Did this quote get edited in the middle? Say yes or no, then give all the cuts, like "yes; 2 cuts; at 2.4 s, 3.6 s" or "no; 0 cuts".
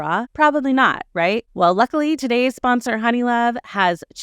yes; 1 cut; at 1.5 s